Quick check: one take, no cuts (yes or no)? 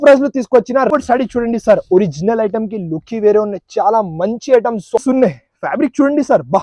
no